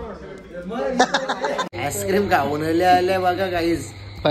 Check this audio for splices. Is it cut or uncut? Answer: cut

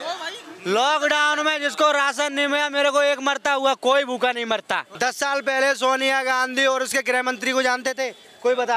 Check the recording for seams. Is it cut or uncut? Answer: cut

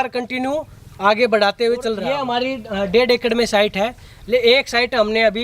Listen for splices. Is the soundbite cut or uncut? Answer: cut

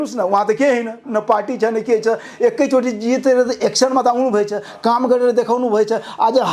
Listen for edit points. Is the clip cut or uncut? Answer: uncut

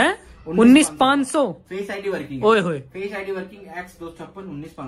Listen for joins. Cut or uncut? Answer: uncut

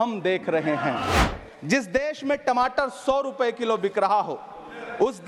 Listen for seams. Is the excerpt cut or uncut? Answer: cut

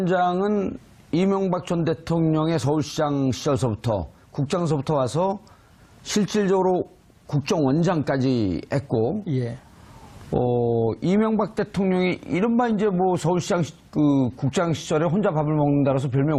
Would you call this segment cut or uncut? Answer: uncut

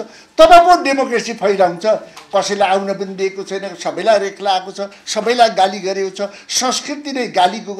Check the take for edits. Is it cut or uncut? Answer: uncut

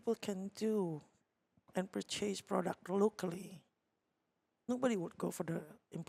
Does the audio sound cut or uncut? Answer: uncut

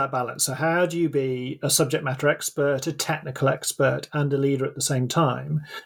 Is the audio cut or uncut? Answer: uncut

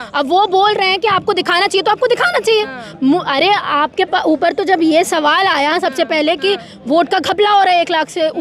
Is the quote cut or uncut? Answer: uncut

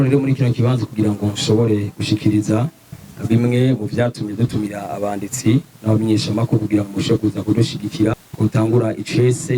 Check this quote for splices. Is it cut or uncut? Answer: cut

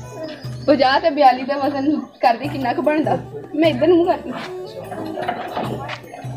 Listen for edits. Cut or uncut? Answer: uncut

